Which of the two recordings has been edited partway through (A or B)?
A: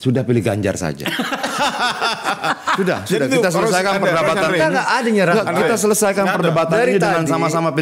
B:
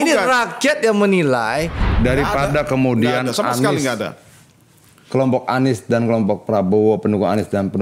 B